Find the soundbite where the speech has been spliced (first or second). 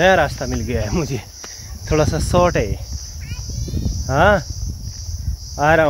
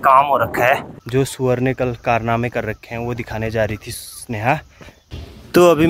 second